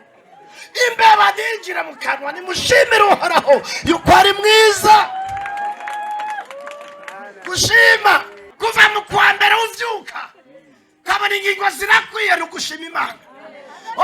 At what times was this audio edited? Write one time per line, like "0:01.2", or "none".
0:08.4